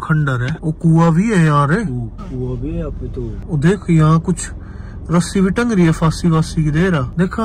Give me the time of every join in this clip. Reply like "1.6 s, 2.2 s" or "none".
none